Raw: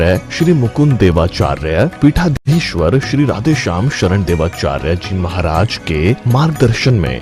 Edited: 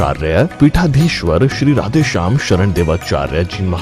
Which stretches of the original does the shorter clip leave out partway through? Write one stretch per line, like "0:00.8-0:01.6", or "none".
0:02.3-0:02.4